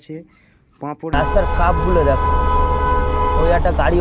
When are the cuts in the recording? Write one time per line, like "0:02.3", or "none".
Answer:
0:01.1